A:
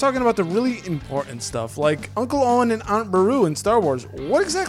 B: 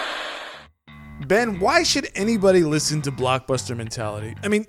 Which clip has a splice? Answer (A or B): B